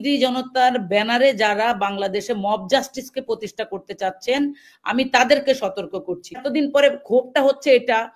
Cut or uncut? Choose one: cut